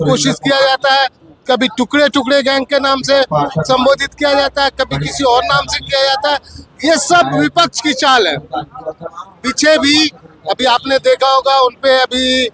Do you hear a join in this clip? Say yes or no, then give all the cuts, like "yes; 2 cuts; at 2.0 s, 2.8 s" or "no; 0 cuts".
no; 0 cuts